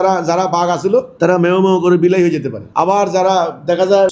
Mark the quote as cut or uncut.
uncut